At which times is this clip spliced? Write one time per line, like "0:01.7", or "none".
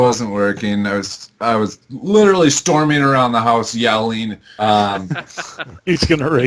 0:04.5